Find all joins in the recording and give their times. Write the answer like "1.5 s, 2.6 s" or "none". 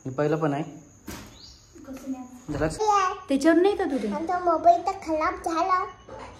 2.8 s